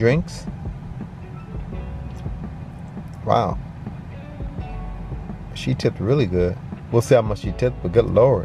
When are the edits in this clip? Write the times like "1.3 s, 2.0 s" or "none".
none